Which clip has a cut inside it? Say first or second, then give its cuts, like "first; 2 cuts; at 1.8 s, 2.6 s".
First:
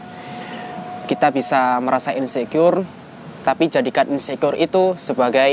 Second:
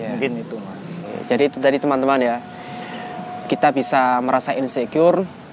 second; 1 cut; at 1.1 s